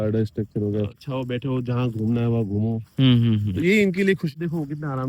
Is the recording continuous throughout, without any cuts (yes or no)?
no